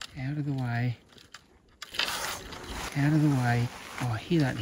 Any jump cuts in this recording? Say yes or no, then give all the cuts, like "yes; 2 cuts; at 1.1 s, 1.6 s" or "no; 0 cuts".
no; 0 cuts